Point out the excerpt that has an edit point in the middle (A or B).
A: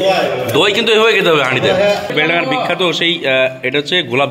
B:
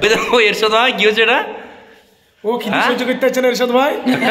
A